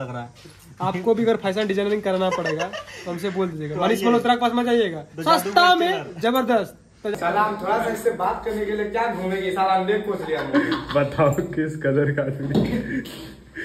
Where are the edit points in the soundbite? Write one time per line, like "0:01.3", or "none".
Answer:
0:07.1